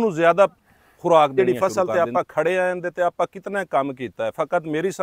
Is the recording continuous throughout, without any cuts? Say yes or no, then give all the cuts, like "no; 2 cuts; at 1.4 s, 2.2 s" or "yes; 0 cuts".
no; 1 cut; at 1.3 s